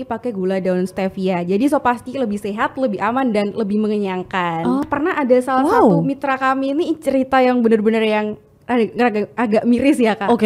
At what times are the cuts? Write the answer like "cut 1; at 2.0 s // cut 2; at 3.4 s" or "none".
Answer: cut 1; at 4.9 s